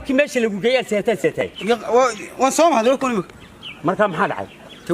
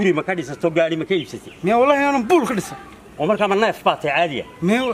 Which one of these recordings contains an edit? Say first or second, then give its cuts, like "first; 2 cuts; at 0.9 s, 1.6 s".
first; 1 cut; at 1.3 s